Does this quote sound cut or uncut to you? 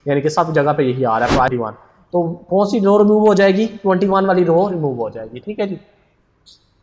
cut